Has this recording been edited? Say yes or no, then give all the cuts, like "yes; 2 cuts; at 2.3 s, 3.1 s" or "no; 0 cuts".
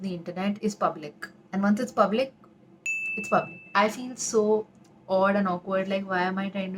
yes; 1 cut; at 3.7 s